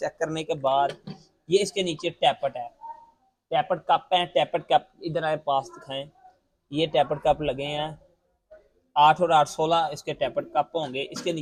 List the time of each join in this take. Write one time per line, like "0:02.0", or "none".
none